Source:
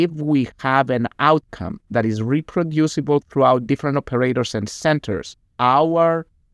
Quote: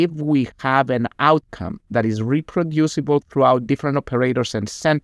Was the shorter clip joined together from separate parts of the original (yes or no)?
no